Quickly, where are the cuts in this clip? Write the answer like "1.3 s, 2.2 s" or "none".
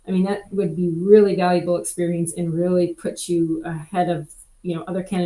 none